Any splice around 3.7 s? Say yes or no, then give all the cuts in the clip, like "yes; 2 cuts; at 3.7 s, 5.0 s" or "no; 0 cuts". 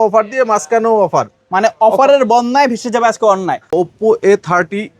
yes; 1 cut; at 3.7 s